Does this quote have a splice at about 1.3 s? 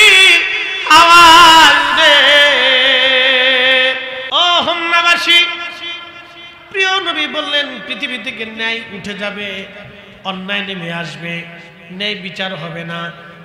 no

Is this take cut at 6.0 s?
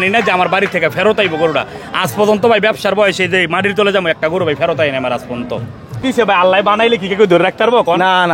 yes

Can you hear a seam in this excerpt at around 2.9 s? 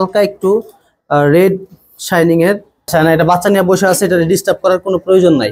yes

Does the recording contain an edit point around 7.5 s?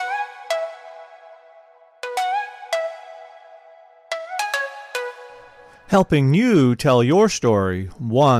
no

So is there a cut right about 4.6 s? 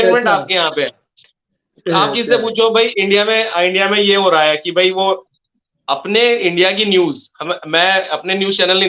no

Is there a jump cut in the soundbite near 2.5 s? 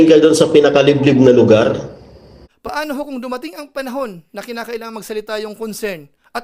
yes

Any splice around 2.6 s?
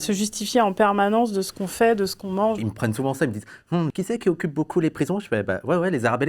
yes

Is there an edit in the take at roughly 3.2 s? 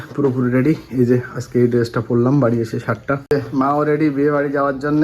yes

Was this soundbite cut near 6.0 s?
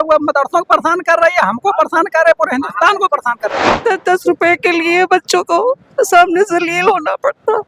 no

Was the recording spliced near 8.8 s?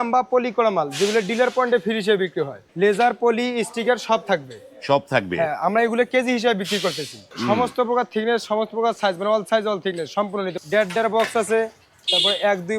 no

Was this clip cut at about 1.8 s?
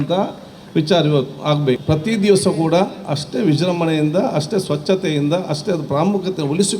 yes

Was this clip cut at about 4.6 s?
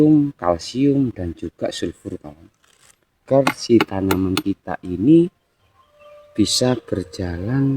no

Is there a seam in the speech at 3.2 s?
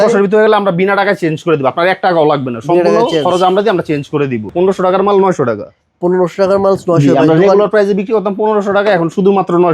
no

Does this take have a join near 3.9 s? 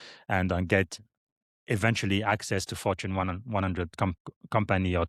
no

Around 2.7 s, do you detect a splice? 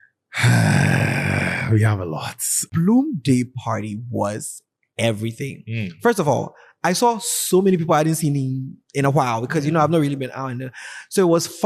yes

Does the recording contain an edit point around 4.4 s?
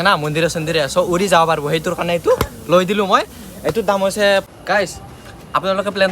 yes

